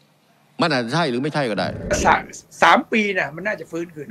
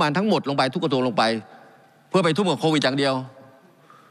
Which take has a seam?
first; 1 cut; at 1.9 s

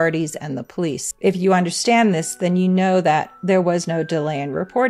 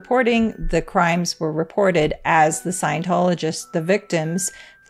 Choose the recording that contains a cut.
first; 1 cut; at 1.0 s

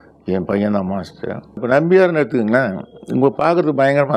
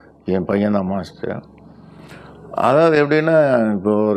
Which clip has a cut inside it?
first; 1 cut; at 1.6 s

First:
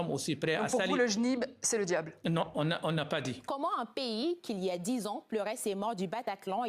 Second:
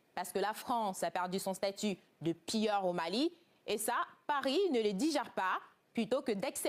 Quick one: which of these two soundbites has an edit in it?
first; 1 cut; at 3.4 s

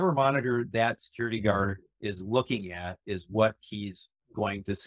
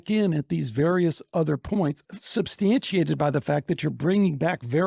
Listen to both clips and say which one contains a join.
second; 1 cut; at 2.1 s

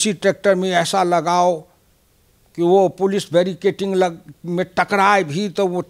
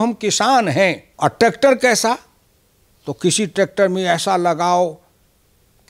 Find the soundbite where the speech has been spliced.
second; 1 cut; at 1.1 s

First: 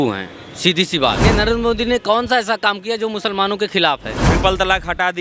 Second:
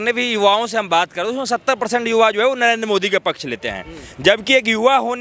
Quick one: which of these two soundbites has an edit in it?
first; 2 cuts; at 1.2 s, 4.2 s

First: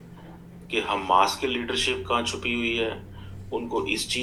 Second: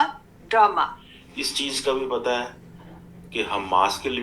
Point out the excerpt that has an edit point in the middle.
second; 1 cut; at 1.2 s

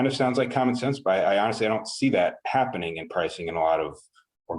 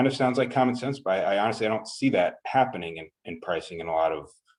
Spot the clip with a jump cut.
first; 1 cut; at 3.0 s

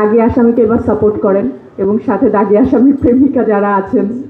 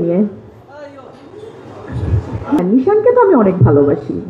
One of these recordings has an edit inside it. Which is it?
second; 1 cut; at 2.6 s

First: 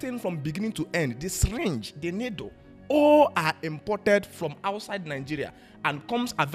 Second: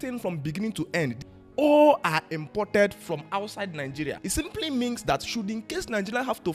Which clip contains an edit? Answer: second; 2 cuts; at 1.3 s, 4.2 s

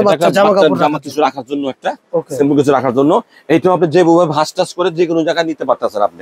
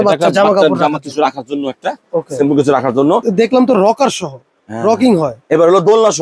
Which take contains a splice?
second; 1 cut; at 3.2 s

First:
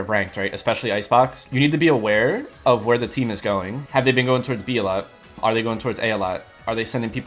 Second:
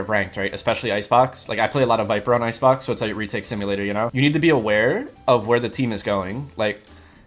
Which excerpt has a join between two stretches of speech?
first; 3 cuts; at 1.5 s, 3.8 s, 5.4 s

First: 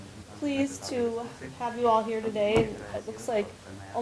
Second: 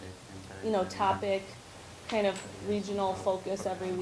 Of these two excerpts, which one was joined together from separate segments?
second; 1 cut; at 1.1 s

